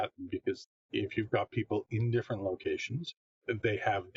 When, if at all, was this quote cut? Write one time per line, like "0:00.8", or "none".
none